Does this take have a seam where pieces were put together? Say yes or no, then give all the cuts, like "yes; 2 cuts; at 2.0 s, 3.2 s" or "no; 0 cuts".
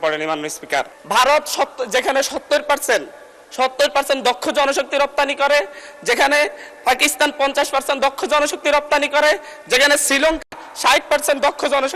yes; 1 cut; at 1.0 s